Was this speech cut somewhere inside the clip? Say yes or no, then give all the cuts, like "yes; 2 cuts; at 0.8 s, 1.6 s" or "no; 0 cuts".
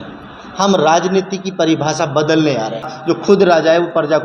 yes; 1 cut; at 2.9 s